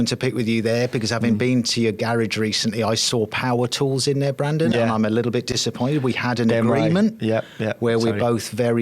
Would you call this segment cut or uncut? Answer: uncut